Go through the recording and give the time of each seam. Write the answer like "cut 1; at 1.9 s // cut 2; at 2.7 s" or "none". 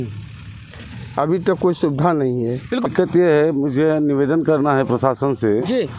cut 1; at 2.9 s

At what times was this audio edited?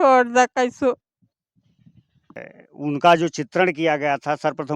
cut 1; at 2.4 s

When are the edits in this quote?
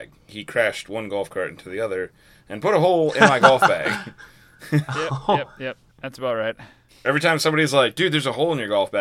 cut 1; at 7.0 s

